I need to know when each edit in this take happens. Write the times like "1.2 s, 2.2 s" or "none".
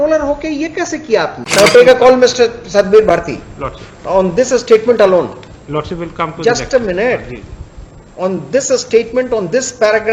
1.4 s